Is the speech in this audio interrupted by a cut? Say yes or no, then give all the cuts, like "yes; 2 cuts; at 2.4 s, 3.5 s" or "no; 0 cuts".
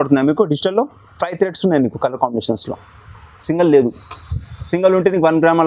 no; 0 cuts